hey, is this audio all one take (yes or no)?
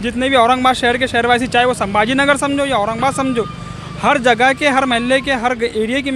yes